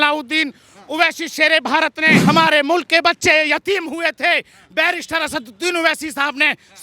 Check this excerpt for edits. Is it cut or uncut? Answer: cut